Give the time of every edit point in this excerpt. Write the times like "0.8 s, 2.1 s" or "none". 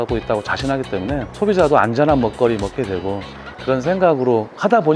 1.3 s, 3.5 s